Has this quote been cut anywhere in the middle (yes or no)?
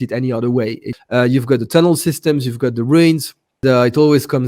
yes